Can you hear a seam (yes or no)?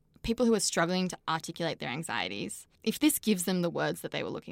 yes